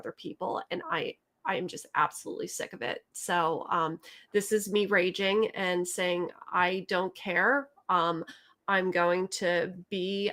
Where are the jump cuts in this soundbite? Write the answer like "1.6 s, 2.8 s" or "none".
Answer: none